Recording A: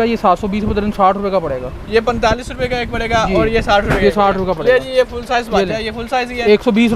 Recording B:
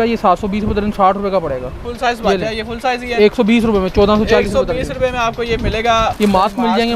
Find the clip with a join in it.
B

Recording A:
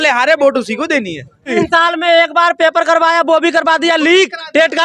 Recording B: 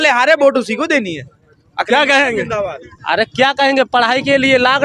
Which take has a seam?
A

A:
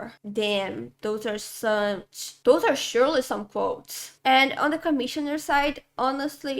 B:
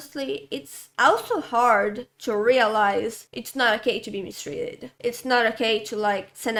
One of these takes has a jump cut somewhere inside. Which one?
A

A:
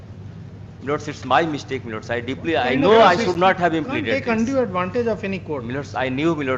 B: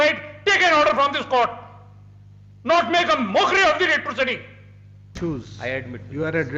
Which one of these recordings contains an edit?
B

